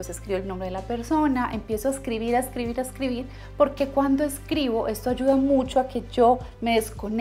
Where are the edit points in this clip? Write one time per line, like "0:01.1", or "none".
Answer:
none

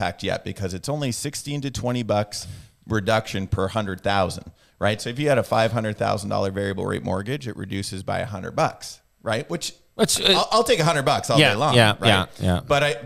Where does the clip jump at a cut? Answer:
none

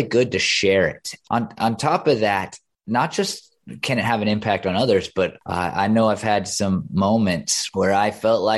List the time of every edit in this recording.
0:01.1
0:05.4
0:07.5

